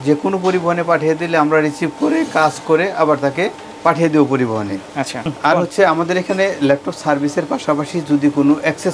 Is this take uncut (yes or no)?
yes